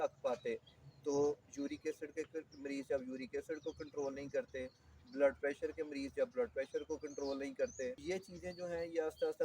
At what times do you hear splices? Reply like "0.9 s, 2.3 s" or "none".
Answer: 8.0 s